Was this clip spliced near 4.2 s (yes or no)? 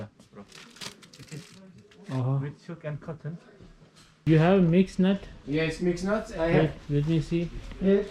yes